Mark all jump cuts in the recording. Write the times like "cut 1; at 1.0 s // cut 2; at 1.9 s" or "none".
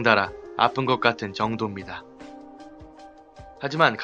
none